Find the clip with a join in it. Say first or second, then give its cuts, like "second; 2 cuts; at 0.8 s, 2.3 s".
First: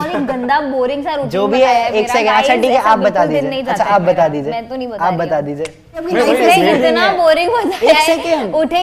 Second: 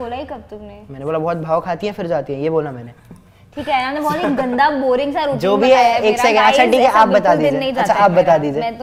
first; 1 cut; at 6.1 s